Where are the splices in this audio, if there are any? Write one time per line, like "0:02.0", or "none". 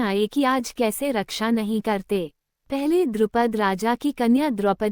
0:01.1

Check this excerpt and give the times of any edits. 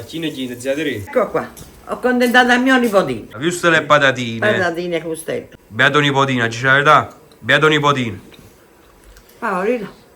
0:03.3
0:05.6

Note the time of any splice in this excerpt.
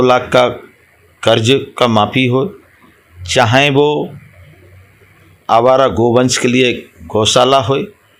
none

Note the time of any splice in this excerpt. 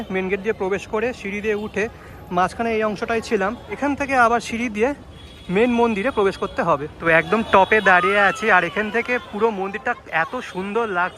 0:03.8
0:07.1

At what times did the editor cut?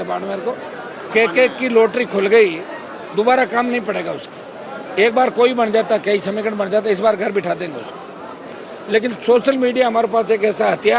0:01.1
0:08.5

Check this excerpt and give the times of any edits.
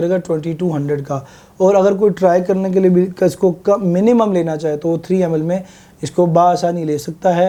none

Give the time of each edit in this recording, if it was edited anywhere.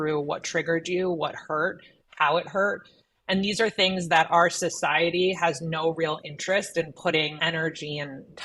0:07.3

